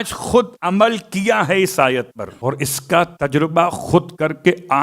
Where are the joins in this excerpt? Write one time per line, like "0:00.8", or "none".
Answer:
0:02.2